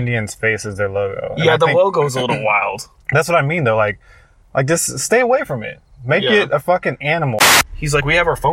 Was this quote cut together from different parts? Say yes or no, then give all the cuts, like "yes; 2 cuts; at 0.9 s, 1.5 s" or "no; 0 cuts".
yes; 1 cut; at 7.6 s